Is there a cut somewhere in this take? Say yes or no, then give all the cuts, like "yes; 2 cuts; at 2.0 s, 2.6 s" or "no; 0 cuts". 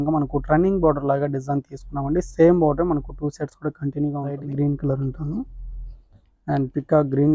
yes; 1 cut; at 4.4 s